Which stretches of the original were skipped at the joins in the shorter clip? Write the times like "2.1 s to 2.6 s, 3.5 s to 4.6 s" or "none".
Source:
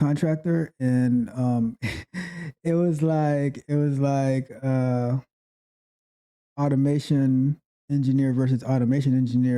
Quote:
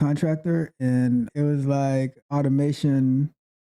1.3 s to 3.6 s, 4.5 s to 6.5 s

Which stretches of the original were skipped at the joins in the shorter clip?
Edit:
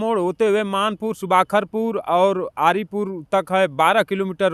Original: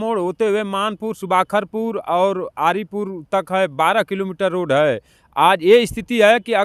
none

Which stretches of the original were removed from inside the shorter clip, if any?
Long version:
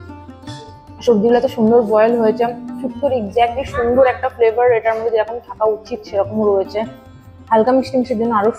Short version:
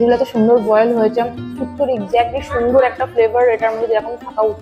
none

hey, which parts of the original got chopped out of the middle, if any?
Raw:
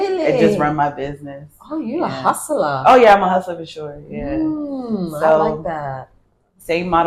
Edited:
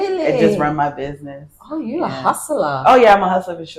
none

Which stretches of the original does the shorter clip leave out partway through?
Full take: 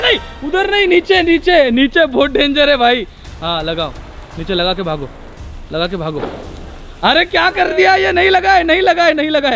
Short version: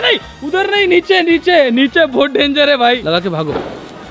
3.0 s to 5.7 s

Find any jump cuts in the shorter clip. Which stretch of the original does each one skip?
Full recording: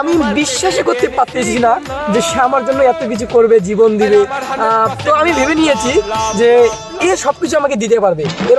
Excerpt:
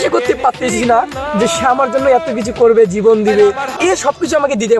4.4 s to 6.9 s

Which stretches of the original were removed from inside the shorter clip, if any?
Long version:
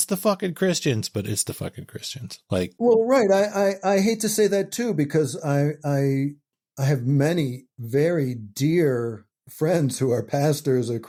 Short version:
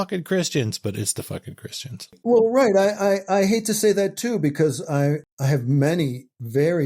2.5 s to 2.7 s, 5.8 s to 6.6 s

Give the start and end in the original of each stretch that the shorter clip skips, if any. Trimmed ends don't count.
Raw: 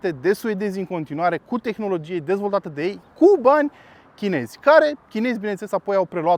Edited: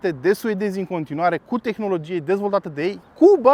none

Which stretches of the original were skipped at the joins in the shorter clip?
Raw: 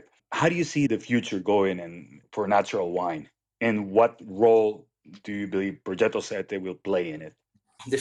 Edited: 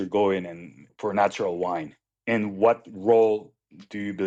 none

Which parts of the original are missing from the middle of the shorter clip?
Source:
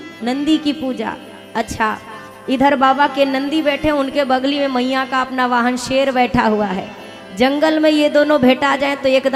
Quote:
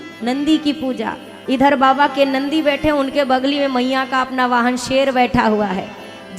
1.3 s to 2.3 s

